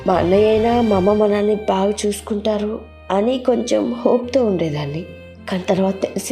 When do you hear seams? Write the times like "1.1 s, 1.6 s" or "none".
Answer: none